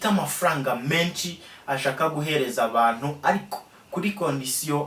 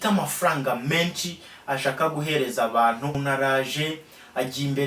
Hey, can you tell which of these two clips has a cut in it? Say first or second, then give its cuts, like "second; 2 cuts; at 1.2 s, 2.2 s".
second; 1 cut; at 3.2 s